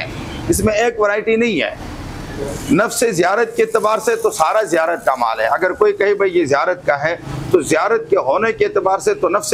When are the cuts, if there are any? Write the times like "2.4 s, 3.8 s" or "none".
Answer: none